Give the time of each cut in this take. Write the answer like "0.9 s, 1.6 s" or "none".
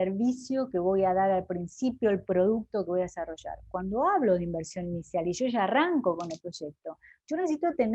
none